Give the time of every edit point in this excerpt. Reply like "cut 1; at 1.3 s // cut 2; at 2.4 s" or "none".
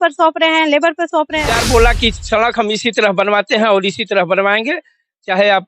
cut 1; at 1.5 s